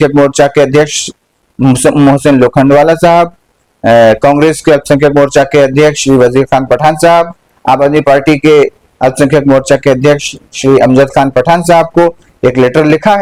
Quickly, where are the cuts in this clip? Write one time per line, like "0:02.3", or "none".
none